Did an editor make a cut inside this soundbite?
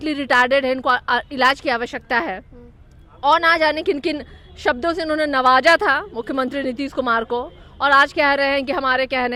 no; 0 cuts

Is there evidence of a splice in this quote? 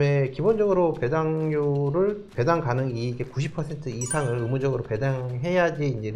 yes; 1 cut; at 2.3 s

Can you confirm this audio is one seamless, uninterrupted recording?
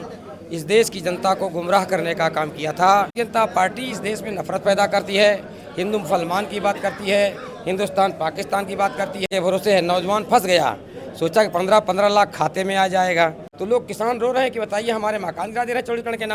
no; 3 cuts; at 3.1 s, 9.3 s, 13.5 s

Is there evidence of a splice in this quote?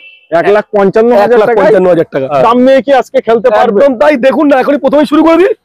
yes; 1 cut; at 2.3 s

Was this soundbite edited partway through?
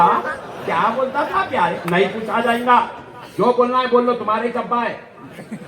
no; 0 cuts

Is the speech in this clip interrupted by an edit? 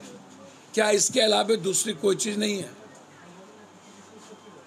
no; 0 cuts

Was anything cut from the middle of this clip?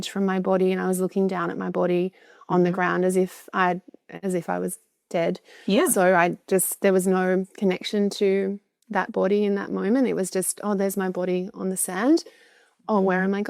no; 0 cuts

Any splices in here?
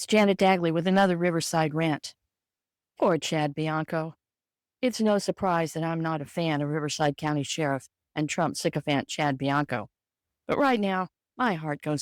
no; 0 cuts

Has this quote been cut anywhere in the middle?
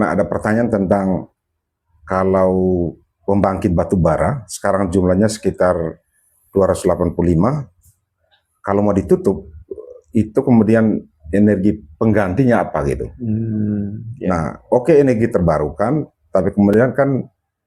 no; 0 cuts

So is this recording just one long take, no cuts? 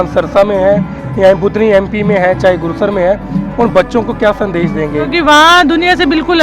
no; 1 cut; at 5.1 s

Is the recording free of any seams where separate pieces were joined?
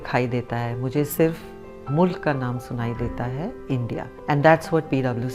no; 1 cut; at 4.1 s

